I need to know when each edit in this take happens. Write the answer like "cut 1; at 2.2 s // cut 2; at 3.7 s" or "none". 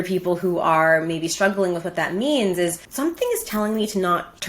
cut 1; at 2.8 s